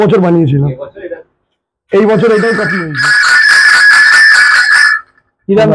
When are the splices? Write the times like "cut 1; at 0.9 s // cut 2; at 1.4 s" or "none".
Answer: cut 1; at 2.8 s